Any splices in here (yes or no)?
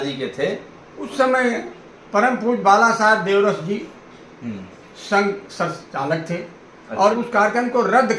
yes